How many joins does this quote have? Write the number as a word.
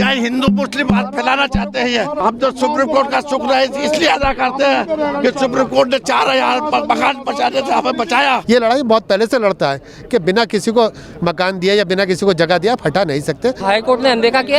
three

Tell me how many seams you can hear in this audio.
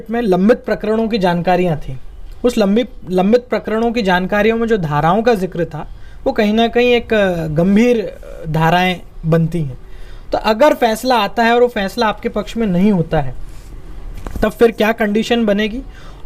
zero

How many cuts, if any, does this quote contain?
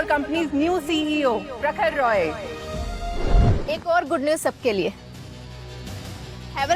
one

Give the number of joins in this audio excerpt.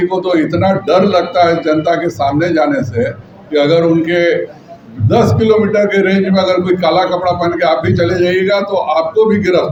zero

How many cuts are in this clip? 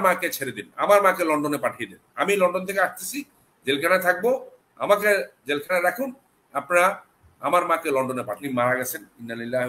one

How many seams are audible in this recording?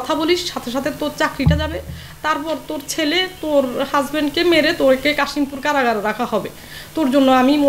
zero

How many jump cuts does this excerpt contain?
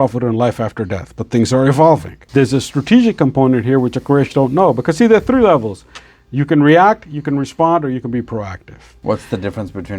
two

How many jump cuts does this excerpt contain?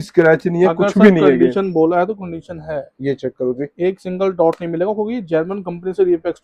zero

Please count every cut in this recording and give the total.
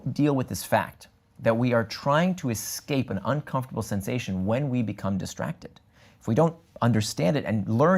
zero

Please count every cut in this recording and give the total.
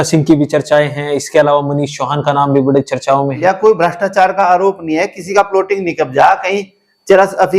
one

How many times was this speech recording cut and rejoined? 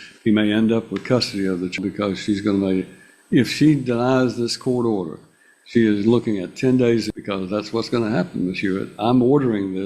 zero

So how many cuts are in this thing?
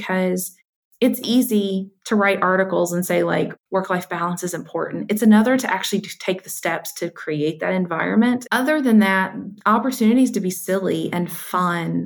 two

